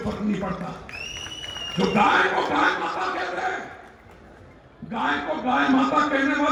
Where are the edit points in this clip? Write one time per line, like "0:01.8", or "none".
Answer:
none